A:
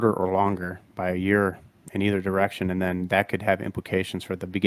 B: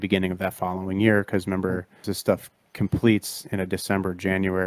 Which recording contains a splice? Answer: B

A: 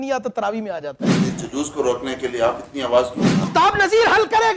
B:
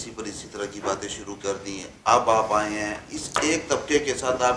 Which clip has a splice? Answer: A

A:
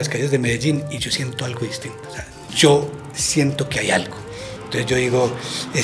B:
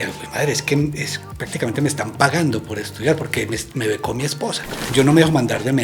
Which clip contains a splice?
B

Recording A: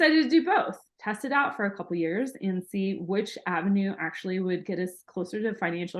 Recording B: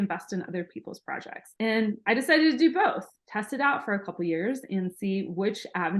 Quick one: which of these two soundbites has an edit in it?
B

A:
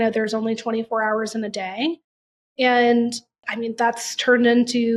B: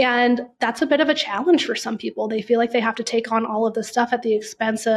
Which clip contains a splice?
A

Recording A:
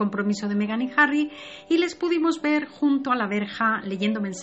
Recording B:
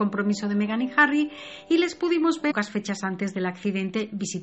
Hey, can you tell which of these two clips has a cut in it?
A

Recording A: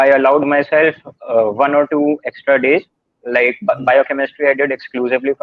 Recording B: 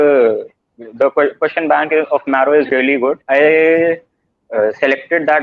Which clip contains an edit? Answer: B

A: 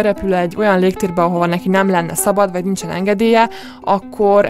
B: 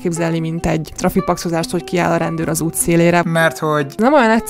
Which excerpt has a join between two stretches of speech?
B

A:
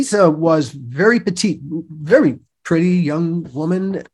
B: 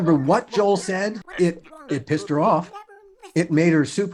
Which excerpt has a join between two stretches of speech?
B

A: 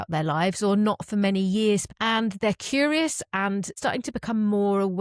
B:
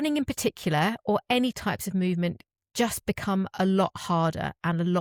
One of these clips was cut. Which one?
A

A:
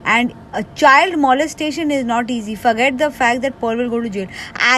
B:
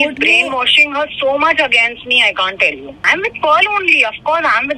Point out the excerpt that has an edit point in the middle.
B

